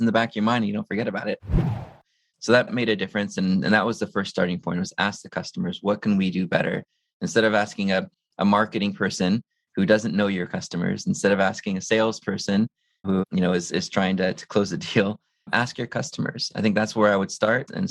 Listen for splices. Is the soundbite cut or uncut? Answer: cut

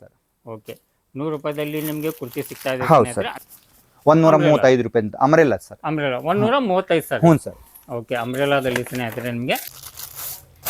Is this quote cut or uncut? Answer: cut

